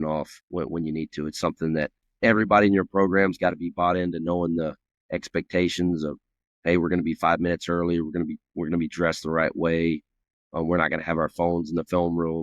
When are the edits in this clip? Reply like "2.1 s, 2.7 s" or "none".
2.0 s

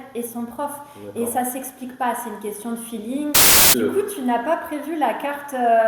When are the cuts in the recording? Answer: 3.6 s

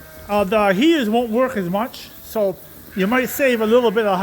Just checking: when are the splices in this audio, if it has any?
none

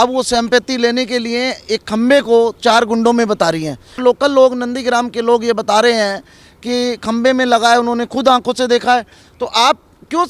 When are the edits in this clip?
4.0 s

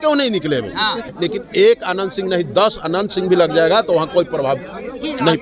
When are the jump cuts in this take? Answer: 1.1 s

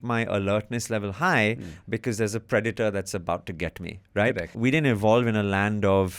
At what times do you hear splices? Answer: 4.5 s

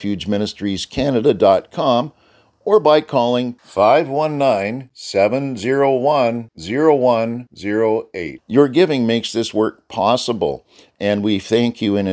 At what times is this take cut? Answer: none

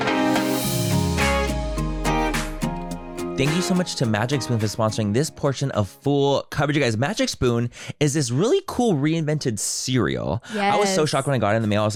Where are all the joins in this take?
none

